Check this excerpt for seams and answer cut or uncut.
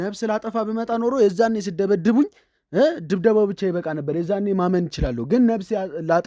uncut